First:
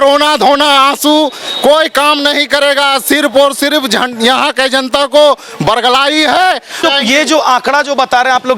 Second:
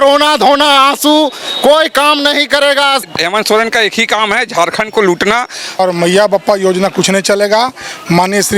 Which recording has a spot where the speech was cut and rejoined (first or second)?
second